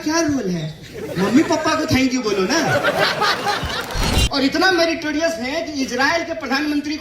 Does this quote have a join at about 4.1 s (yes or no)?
yes